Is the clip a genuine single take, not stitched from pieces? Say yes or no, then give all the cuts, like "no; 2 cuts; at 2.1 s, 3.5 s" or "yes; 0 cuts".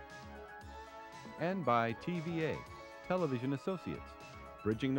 yes; 0 cuts